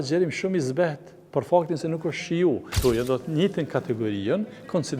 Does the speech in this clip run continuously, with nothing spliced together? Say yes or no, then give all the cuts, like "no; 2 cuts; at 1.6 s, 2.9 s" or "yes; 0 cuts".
no; 1 cut; at 2.7 s